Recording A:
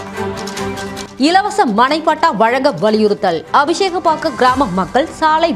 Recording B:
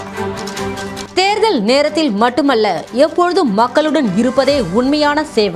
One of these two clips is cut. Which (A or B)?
B